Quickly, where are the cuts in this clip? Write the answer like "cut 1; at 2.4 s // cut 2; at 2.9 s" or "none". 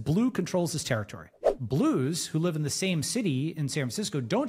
cut 1; at 1.5 s